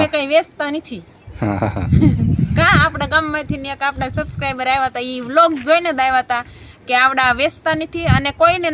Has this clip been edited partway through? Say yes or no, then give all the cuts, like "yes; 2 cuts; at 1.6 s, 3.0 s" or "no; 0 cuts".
no; 0 cuts